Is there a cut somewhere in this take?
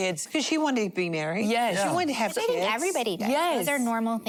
no; 0 cuts

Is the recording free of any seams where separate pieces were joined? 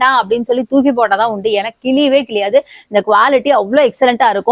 yes; 0 cuts

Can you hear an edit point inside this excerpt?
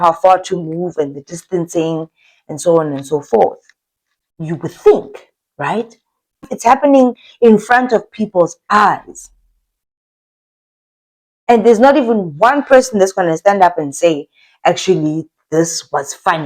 yes; 1 cut; at 6.4 s

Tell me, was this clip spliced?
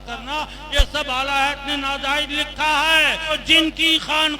yes; 1 cut; at 3.4 s

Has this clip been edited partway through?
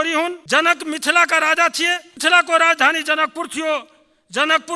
no; 0 cuts

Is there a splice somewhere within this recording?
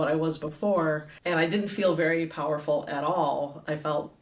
yes; 1 cut; at 1.1 s

